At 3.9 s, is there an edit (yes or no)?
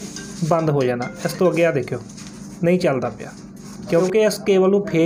yes